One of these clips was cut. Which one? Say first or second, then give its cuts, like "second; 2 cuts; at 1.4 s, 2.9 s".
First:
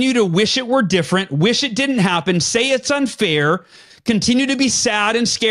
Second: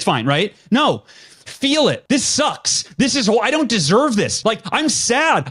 second; 2 cuts; at 2.0 s, 4.3 s